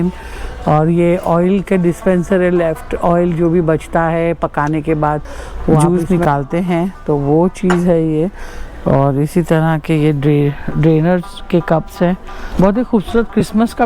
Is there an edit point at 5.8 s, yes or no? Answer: yes